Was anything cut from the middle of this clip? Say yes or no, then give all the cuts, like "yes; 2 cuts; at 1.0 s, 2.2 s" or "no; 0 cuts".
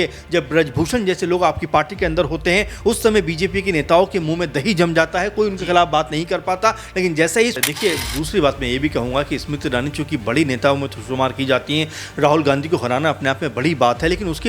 yes; 1 cut; at 7.5 s